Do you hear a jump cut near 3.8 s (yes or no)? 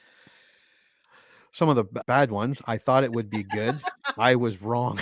no